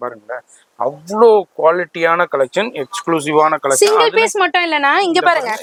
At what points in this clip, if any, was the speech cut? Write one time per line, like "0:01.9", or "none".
none